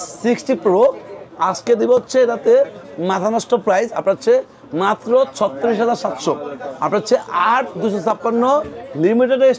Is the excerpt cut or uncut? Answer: uncut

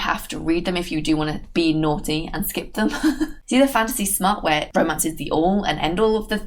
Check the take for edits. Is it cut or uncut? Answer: cut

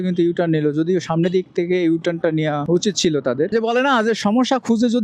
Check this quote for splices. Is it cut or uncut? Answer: cut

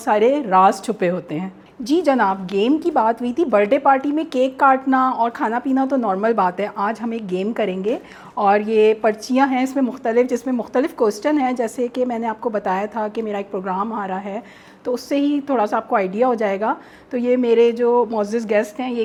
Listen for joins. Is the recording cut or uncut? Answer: uncut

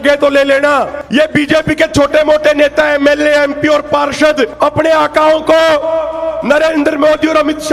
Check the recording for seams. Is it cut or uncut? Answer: cut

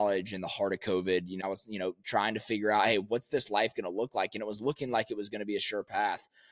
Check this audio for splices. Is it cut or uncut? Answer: cut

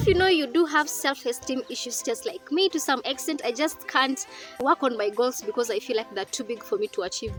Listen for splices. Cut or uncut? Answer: uncut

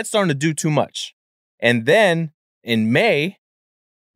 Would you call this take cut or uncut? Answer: cut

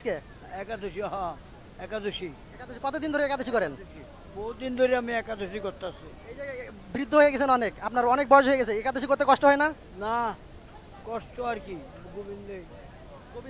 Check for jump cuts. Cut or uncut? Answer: uncut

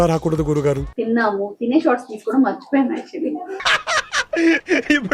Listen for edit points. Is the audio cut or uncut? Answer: cut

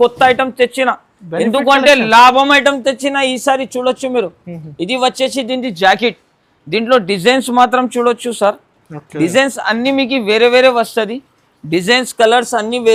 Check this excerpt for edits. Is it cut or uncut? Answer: uncut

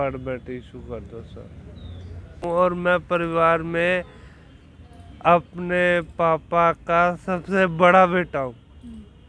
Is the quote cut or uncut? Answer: cut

